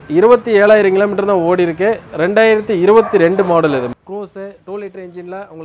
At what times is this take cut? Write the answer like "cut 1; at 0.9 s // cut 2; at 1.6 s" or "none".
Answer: cut 1; at 2.1 s // cut 2; at 3.9 s

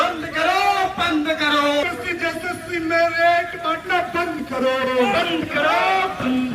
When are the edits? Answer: cut 1; at 1.8 s

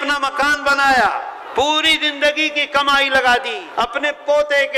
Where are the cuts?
cut 1; at 1.4 s // cut 2; at 3.6 s

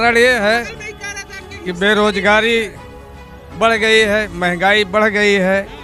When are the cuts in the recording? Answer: none

